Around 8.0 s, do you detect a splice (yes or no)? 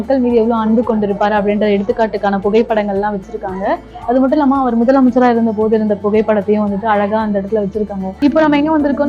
yes